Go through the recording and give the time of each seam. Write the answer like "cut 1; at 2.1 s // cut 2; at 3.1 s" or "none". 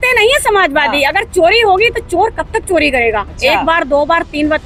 none